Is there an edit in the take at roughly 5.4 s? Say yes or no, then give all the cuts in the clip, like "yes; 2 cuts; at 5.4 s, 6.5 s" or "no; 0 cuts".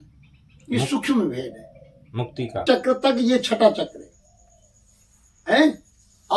no; 1 cut; at 2.6 s